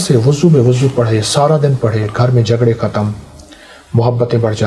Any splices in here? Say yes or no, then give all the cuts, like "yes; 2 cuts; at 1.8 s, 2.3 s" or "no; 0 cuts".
no; 0 cuts